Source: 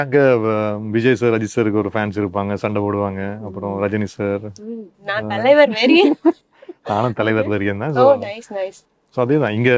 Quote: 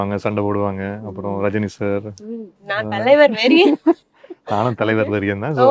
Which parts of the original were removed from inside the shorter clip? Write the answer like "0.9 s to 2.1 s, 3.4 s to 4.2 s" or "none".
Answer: none